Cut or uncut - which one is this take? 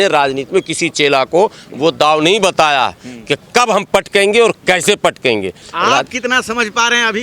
cut